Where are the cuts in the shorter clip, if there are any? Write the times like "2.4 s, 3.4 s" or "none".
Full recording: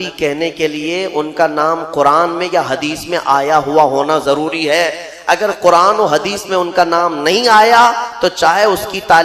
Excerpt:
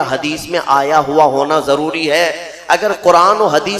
none